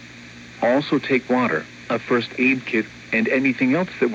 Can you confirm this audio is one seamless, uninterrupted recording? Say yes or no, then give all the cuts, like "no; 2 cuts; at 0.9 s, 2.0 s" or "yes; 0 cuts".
yes; 0 cuts